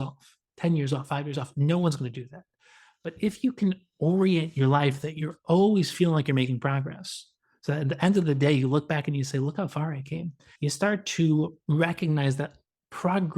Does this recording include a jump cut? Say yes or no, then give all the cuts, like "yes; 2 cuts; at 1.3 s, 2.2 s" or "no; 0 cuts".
yes; 2 cuts; at 10.4 s, 11.6 s